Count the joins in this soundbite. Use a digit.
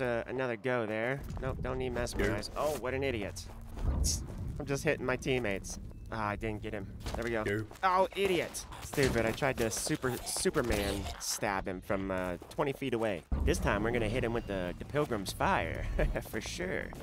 0